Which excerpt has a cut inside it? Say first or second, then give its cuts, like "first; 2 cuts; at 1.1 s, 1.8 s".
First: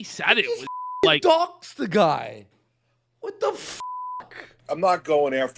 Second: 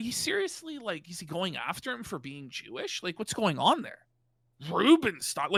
first; 1 cut; at 4.5 s